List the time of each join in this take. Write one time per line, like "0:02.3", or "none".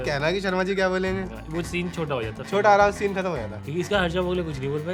none